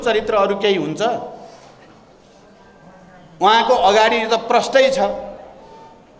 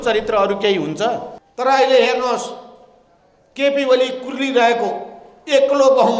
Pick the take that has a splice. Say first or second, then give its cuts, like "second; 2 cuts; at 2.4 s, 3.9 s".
second; 1 cut; at 1.4 s